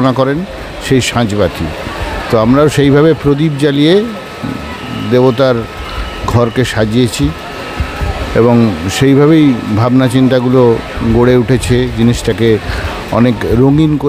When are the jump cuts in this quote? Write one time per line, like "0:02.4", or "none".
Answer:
none